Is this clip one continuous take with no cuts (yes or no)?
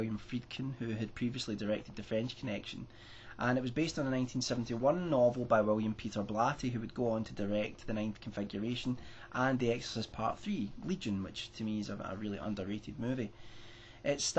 no